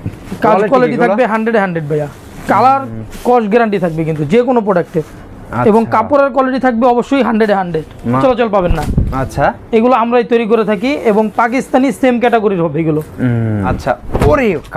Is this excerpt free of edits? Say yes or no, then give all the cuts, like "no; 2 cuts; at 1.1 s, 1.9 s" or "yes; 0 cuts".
no; 2 cuts; at 8.2 s, 13.7 s